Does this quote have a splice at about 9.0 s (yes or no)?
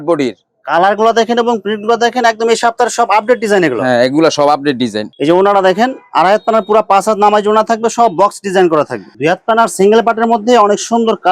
yes